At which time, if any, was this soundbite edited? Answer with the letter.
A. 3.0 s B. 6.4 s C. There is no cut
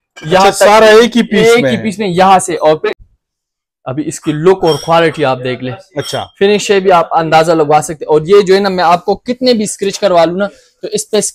A